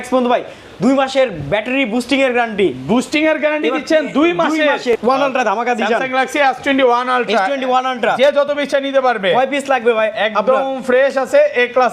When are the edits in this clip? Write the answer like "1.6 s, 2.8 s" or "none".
4.9 s